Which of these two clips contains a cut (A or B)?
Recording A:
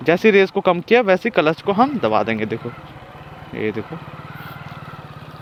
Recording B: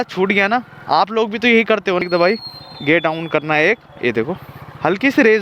B